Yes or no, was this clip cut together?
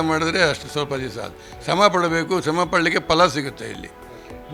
no